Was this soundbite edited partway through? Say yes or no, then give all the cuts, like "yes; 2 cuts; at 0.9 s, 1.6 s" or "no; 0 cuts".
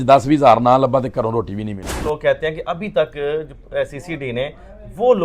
yes; 1 cut; at 2.0 s